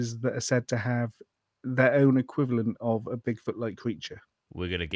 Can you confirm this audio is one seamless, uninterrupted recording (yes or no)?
yes